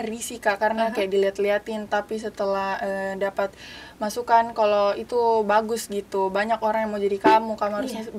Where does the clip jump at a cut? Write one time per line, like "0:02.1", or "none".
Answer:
none